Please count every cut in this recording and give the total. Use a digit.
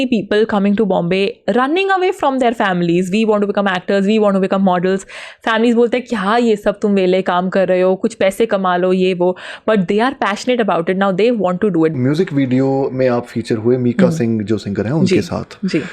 1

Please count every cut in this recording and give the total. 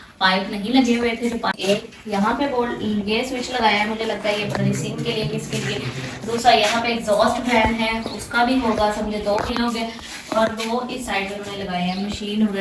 1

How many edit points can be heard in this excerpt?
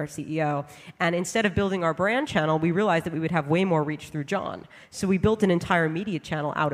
0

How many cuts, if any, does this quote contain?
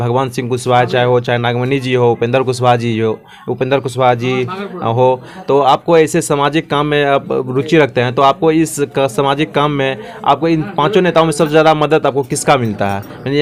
0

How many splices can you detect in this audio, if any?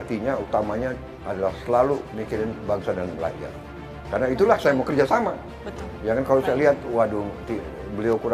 0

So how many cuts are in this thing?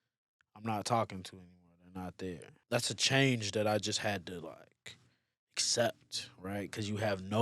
1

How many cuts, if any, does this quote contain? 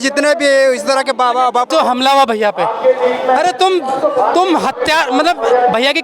1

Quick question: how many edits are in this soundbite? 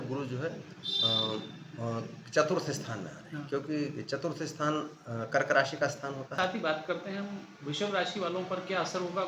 1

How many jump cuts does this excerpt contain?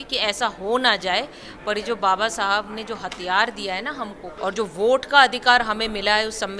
1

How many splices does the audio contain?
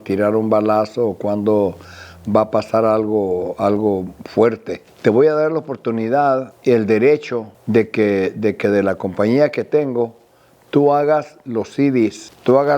1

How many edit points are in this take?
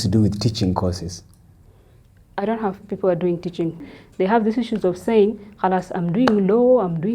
1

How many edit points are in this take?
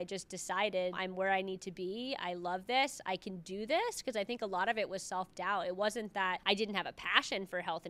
2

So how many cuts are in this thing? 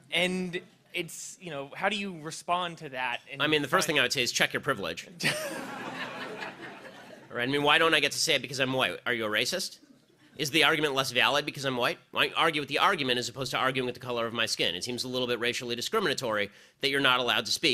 1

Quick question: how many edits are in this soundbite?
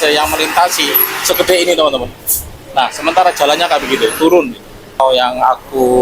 1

